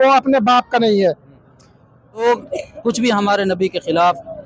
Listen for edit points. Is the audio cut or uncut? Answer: cut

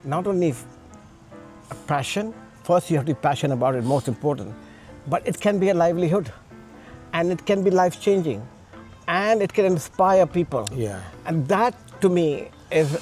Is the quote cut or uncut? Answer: uncut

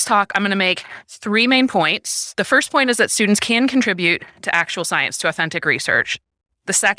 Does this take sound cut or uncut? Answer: cut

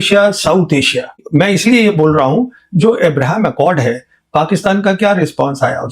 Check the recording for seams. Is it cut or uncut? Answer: cut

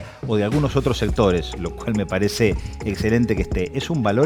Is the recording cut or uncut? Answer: uncut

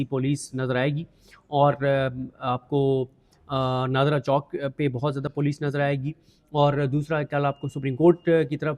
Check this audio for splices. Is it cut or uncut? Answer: uncut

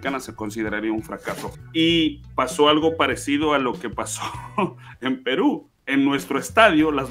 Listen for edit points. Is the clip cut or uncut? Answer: cut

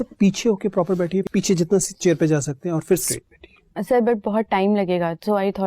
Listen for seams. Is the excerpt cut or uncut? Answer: cut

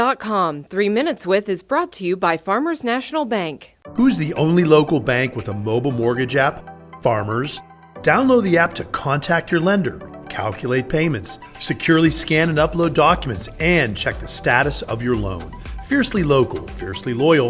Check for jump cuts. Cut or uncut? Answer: uncut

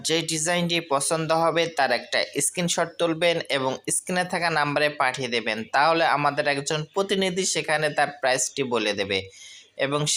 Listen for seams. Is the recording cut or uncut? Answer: uncut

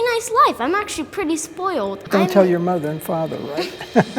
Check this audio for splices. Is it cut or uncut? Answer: cut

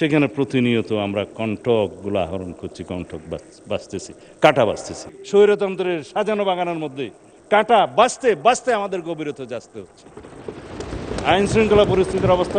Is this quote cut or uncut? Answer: cut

